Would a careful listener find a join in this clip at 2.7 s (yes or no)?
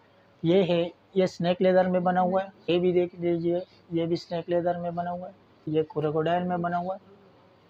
yes